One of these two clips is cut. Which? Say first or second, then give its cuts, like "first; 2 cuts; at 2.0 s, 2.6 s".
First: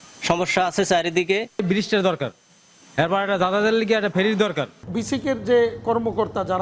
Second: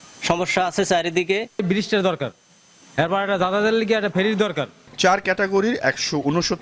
first; 1 cut; at 4.8 s